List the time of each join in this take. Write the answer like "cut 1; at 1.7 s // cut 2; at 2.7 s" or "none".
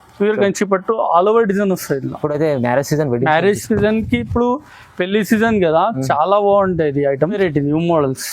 cut 1; at 7.4 s